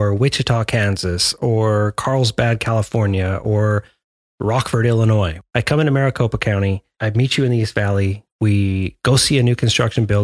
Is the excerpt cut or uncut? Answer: cut